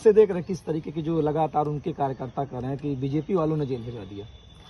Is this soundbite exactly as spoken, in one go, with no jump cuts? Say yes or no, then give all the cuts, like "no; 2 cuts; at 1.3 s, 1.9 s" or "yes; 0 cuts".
yes; 0 cuts